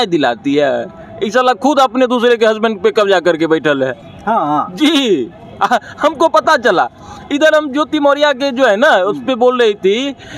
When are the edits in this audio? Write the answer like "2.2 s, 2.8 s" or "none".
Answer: none